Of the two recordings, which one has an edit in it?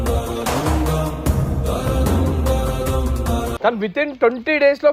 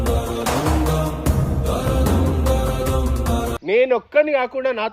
second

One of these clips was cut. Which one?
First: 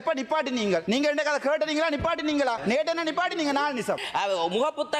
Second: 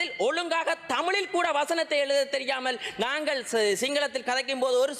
first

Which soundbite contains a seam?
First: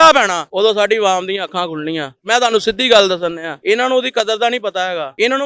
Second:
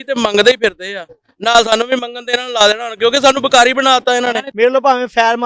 second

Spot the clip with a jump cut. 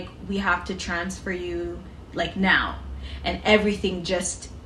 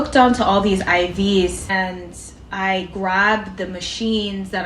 second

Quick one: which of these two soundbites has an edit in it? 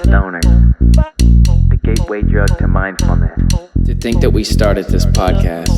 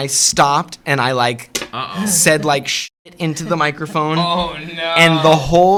first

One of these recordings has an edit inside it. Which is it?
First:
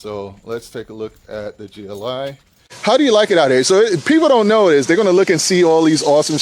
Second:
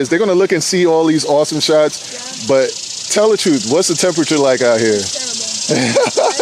first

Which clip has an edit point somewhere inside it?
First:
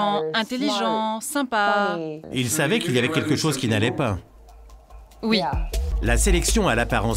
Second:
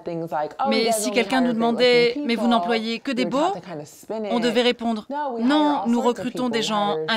first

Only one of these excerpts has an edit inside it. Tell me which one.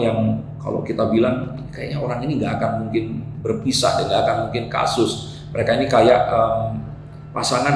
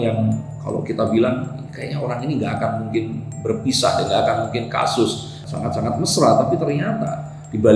second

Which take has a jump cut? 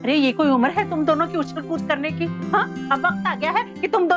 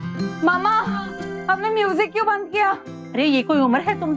first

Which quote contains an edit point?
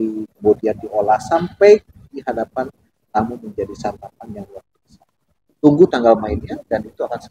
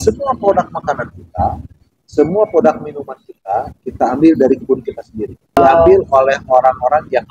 second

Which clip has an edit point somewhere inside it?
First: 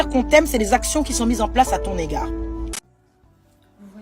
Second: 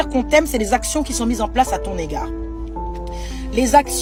first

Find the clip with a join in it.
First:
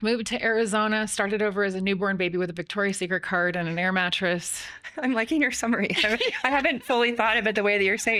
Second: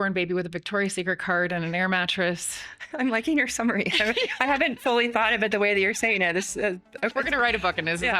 second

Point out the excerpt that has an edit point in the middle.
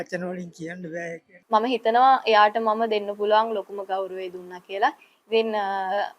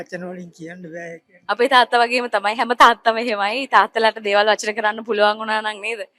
first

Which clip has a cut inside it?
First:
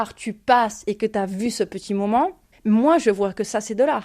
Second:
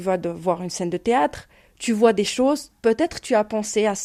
first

